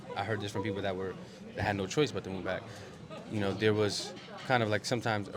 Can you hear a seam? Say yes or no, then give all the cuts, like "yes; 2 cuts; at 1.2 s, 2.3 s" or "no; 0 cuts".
no; 0 cuts